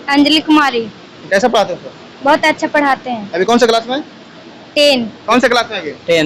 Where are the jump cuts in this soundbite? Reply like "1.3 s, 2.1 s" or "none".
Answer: 5.2 s